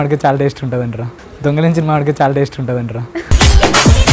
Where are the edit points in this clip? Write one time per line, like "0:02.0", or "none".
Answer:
none